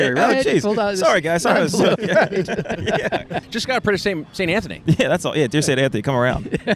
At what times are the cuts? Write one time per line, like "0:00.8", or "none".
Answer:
0:03.4